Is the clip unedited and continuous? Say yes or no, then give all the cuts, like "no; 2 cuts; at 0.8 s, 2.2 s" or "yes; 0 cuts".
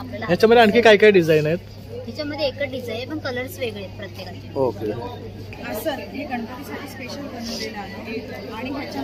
no; 1 cut; at 5.5 s